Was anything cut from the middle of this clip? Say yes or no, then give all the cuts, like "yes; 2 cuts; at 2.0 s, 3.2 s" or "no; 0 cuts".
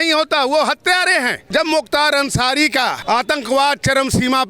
yes; 2 cuts; at 1.4 s, 3.0 s